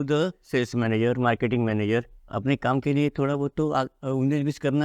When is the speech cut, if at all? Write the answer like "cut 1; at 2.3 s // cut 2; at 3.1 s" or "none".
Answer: cut 1; at 2.2 s